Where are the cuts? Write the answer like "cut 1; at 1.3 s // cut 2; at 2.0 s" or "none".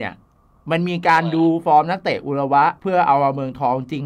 cut 1; at 2.8 s